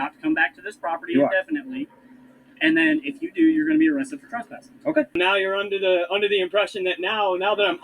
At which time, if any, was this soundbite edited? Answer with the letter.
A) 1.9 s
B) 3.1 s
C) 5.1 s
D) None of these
C